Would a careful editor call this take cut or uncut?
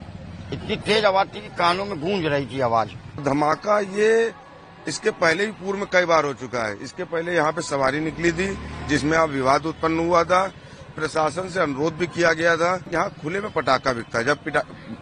cut